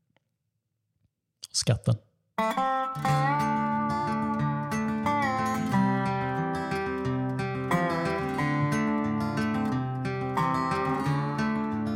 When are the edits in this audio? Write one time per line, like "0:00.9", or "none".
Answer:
0:02.1